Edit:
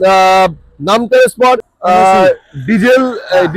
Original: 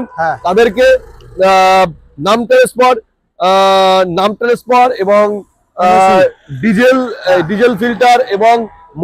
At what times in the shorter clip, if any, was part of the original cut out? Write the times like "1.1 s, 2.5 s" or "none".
1.7 s